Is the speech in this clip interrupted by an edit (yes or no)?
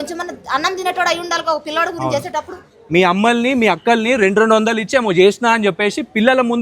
yes